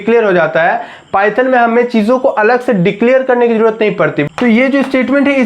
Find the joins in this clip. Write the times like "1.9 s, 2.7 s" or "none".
4.2 s